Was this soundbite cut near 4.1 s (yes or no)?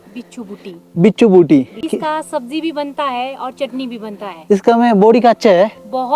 no